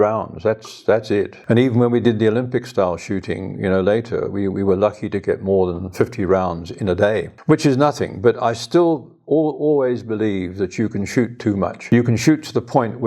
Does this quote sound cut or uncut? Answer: cut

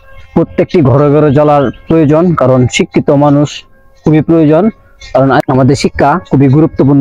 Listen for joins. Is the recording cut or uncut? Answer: cut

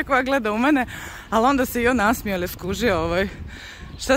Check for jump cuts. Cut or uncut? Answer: uncut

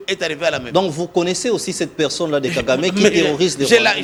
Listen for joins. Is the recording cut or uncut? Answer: uncut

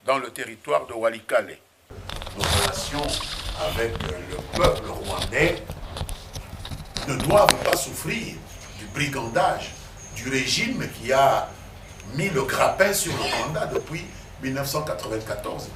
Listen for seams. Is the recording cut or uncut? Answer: cut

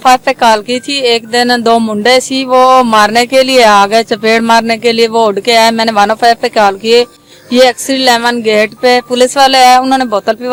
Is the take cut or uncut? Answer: uncut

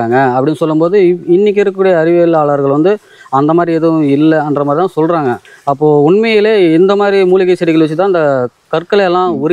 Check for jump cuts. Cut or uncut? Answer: uncut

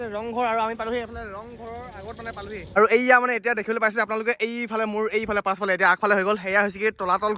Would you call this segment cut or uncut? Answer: cut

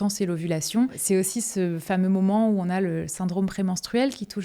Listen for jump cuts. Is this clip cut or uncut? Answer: cut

